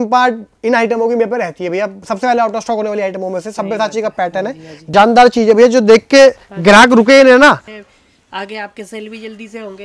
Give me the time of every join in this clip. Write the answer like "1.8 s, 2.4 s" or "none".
4.9 s, 7.7 s